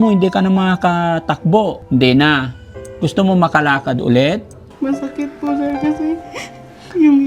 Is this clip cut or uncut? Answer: cut